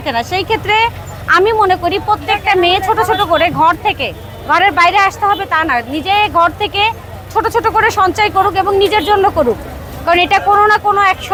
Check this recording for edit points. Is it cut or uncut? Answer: uncut